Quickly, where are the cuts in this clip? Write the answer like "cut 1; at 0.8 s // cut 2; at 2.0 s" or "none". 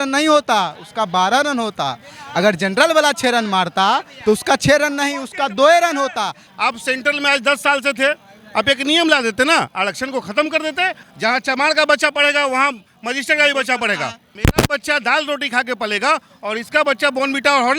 cut 1; at 6.4 s // cut 2; at 11.0 s // cut 3; at 14.3 s